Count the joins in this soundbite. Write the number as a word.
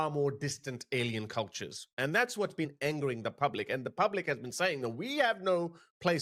zero